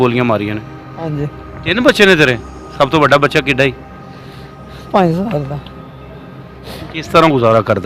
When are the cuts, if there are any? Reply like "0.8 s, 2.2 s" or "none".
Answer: 1.3 s